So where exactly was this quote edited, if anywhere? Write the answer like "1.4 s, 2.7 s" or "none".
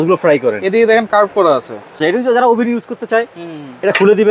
2.0 s